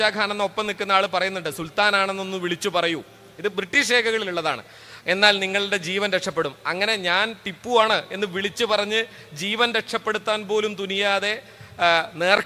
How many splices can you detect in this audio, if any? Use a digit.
0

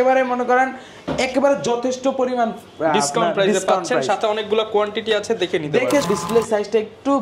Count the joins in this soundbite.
1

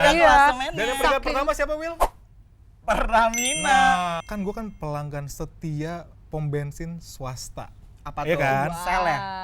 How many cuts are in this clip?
1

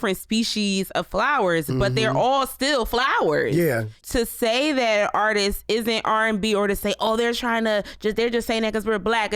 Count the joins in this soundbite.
1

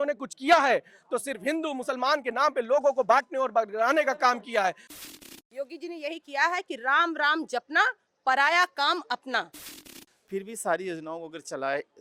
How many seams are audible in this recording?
2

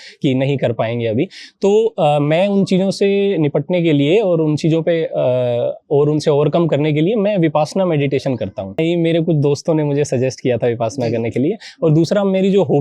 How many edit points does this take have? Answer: 1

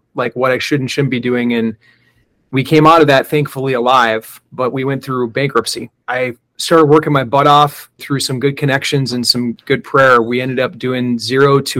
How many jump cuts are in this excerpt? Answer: 3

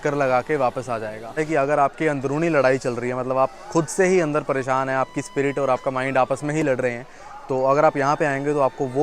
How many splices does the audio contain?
1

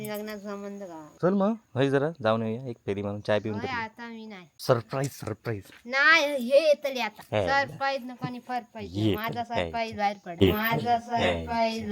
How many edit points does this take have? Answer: 3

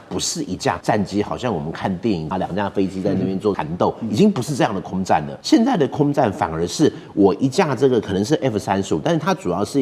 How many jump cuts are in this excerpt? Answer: 4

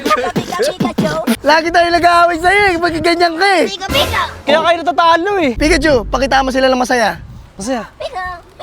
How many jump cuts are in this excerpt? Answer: 2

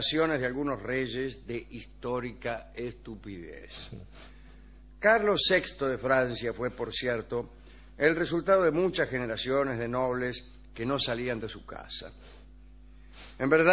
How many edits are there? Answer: 0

